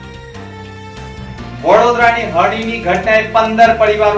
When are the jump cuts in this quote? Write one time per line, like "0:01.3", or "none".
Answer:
none